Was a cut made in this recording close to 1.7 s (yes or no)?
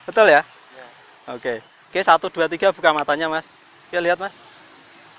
yes